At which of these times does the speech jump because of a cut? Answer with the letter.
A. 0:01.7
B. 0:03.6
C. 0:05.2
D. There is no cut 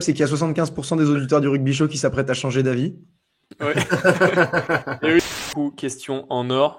C